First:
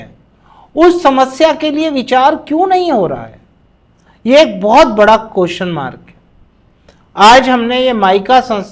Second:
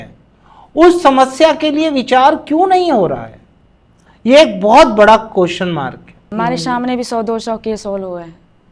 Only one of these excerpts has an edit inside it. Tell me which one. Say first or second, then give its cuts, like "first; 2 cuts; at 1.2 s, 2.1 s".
second; 1 cut; at 6.2 s